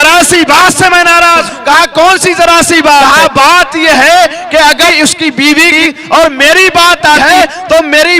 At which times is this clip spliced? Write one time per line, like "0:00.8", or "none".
0:01.5
0:03.1
0:05.7
0:07.2

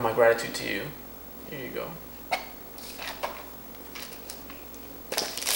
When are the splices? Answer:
0:04.0

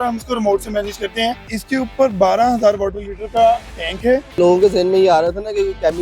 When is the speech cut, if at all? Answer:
0:01.5
0:04.4

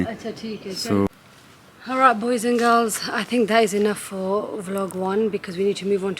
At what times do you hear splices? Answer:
0:01.1

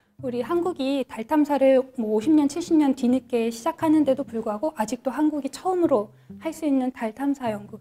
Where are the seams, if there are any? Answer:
none

